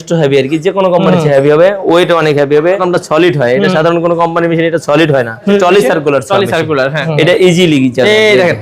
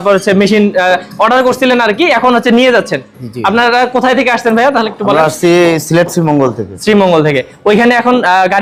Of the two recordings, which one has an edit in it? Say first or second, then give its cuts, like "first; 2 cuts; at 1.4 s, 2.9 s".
first; 3 cuts; at 2.8 s, 5.5 s, 7.0 s